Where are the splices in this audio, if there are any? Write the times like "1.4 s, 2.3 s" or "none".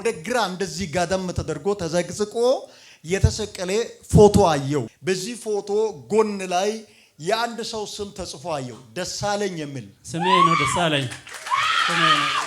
4.9 s